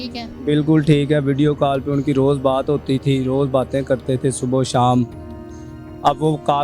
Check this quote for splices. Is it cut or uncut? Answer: uncut